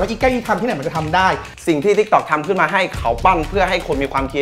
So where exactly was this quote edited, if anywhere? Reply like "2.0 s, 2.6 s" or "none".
1.5 s